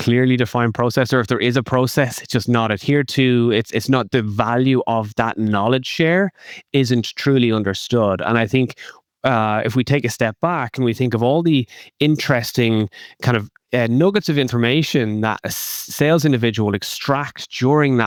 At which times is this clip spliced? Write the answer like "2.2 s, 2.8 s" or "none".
none